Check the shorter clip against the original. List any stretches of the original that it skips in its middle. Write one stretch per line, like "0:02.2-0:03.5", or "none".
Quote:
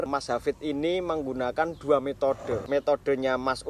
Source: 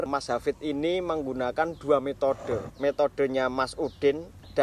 0:02.6-0:02.7